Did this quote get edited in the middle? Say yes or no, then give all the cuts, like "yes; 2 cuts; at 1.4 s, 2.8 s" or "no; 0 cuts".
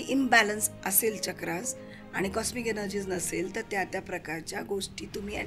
no; 0 cuts